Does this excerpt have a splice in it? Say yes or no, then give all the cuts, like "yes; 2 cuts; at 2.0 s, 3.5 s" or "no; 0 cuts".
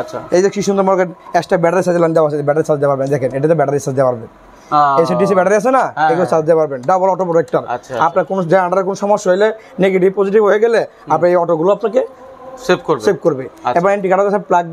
no; 0 cuts